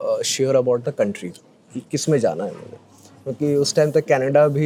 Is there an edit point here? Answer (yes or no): no